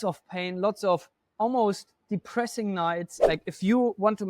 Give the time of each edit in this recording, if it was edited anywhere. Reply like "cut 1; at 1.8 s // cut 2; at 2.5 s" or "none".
cut 1; at 3.1 s